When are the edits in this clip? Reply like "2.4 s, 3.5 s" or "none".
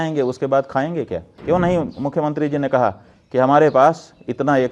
1.3 s

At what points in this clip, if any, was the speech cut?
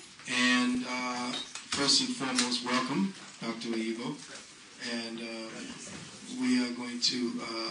none

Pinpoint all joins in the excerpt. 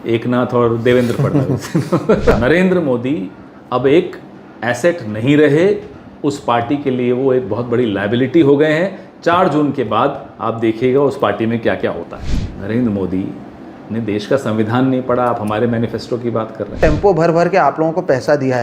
2.3 s, 12.2 s, 16.8 s

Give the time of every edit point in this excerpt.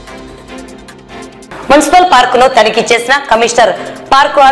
1.2 s

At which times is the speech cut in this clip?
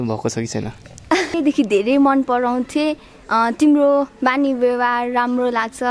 1.3 s

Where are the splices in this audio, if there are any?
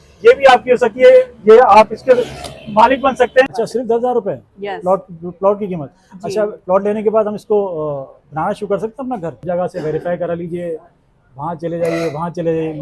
3.5 s, 9.4 s

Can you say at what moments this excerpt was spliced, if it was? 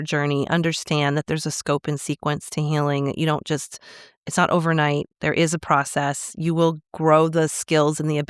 none

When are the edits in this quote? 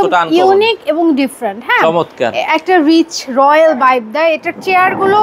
none

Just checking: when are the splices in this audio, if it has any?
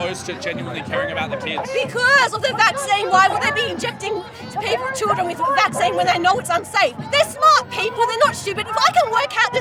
none

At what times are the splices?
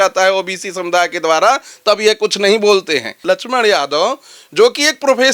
3.2 s

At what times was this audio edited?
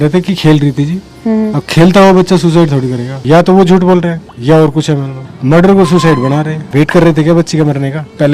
3.1 s, 5.2 s, 6.6 s

